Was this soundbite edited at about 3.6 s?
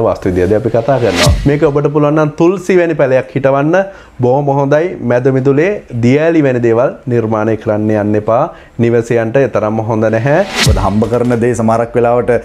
no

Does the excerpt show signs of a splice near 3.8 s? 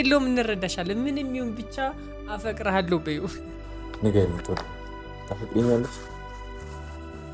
yes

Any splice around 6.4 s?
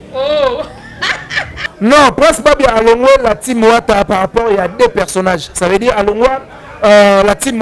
no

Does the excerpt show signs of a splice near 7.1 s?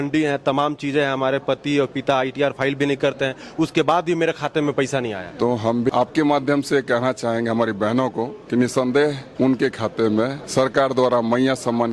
no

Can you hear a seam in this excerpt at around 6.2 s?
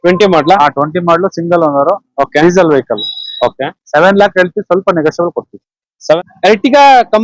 yes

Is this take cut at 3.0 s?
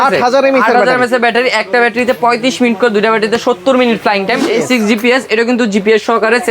no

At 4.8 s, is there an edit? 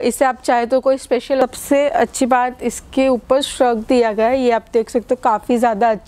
no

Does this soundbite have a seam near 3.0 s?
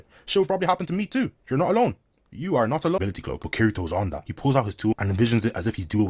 yes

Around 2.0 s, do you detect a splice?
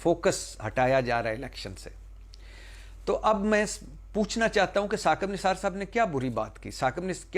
no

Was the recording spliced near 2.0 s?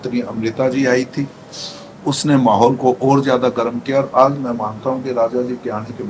no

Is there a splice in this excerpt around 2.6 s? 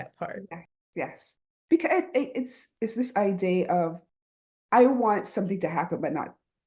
yes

